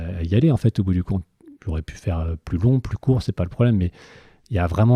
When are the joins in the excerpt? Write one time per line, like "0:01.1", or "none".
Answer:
none